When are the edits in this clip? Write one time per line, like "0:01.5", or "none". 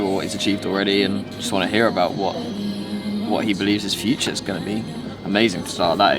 none